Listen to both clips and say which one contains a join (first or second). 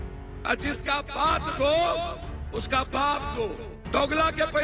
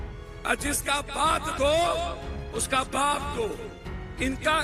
first